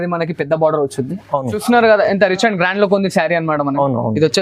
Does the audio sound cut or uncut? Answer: cut